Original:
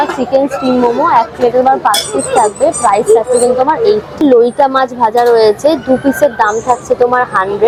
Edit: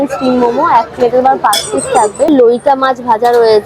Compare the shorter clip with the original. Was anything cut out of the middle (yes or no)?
yes